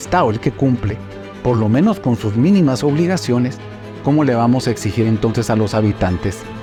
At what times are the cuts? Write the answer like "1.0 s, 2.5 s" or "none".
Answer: none